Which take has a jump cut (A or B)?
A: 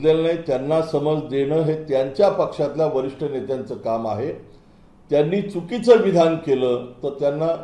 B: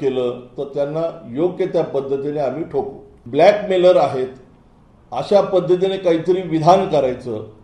B